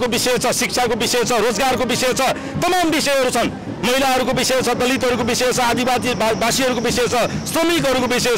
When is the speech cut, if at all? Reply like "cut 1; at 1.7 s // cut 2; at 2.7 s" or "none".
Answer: none